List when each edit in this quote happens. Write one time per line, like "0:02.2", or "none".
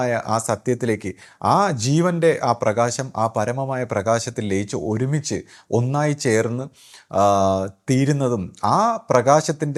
none